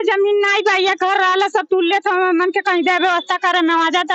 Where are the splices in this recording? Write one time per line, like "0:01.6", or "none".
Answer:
none

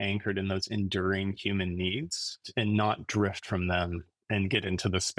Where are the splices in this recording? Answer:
0:02.5

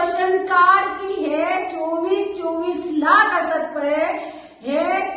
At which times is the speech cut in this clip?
none

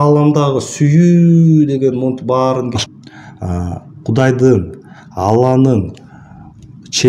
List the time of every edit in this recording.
0:02.7

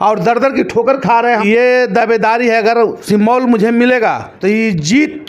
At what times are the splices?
0:01.4
0:03.0
0:04.3

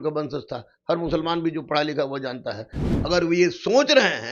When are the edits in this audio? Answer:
0:02.8

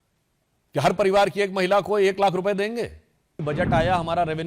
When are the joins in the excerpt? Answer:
0:03.4

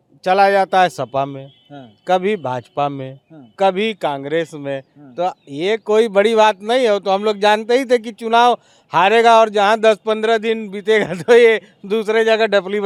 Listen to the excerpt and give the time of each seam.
none

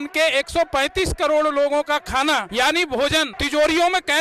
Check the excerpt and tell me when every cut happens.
0:02.5
0:03.4

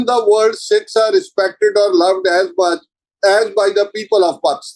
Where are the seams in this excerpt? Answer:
none

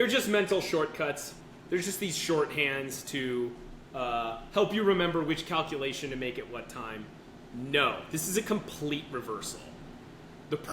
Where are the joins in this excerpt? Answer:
0:01.3

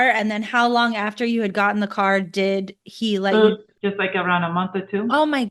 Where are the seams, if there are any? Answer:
0:03.7

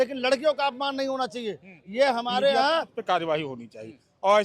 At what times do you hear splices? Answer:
0:02.9

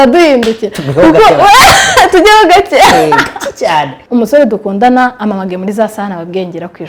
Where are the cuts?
0:04.0

